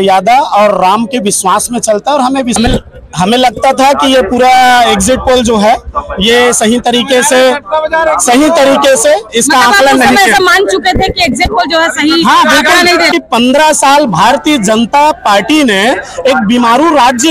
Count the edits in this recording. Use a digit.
2